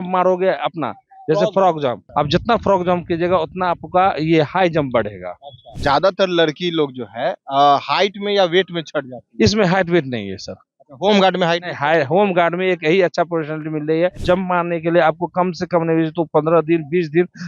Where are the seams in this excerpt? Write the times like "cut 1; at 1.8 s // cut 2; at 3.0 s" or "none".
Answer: cut 1; at 2.0 s // cut 2; at 5.7 s // cut 3; at 14.2 s